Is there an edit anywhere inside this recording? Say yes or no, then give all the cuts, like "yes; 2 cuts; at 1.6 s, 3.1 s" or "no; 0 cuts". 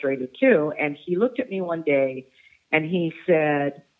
no; 0 cuts